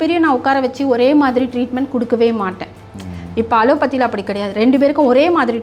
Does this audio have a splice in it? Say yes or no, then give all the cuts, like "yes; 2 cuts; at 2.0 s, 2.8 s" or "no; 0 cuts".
no; 0 cuts